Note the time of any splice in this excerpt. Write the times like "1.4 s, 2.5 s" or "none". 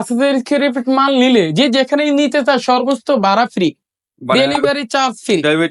none